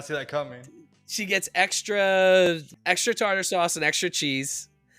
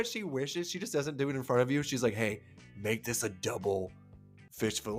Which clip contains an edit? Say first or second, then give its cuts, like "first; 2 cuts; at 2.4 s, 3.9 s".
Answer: first; 1 cut; at 2.7 s